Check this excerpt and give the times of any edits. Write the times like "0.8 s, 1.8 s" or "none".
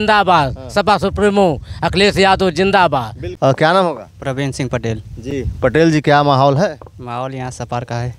none